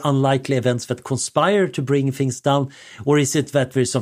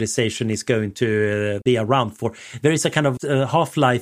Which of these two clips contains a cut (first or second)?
second